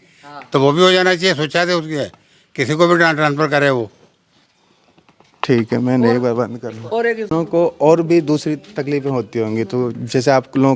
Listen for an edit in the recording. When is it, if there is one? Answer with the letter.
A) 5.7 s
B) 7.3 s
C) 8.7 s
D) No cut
D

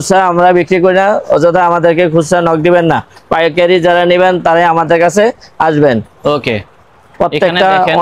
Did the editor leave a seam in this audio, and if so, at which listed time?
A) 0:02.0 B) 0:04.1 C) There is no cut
C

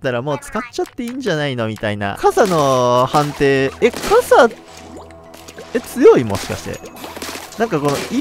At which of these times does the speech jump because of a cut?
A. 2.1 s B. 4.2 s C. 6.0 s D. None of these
A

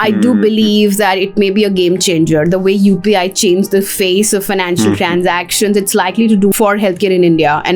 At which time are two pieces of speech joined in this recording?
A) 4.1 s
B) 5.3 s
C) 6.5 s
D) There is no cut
C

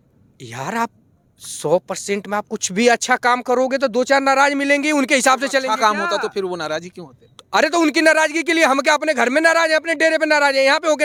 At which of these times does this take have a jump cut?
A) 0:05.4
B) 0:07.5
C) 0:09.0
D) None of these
D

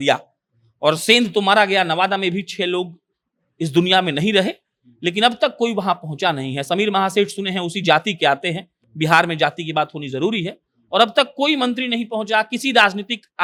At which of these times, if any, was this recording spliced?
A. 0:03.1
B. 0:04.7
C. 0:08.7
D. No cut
D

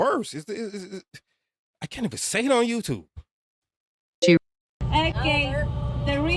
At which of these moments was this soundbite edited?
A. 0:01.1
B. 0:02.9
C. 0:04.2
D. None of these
D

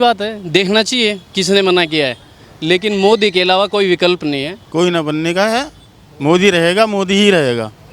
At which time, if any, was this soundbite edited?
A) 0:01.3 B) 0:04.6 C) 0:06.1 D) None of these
B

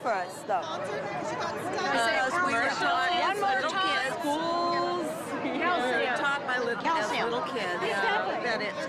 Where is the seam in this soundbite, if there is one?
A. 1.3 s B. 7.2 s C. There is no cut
C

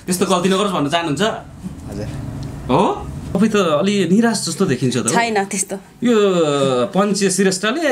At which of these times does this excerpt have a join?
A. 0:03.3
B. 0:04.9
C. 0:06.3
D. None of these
A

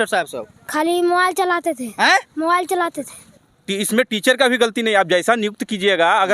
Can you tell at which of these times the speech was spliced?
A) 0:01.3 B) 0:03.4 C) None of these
B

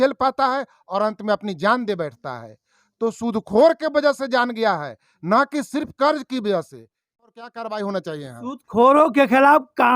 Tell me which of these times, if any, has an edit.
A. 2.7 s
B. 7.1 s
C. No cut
B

